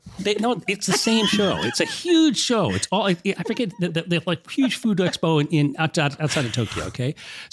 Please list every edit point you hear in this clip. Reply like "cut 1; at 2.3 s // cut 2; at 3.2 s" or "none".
none